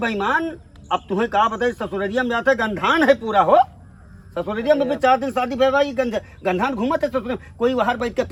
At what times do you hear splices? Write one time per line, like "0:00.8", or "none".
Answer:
none

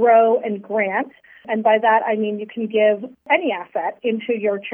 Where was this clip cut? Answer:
0:01.4
0:03.3

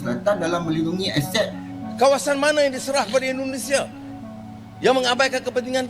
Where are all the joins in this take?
0:01.6

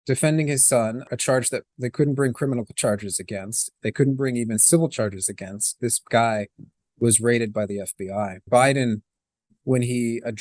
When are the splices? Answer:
0:01.1
0:08.4

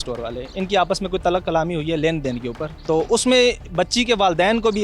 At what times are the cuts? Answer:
0:02.7

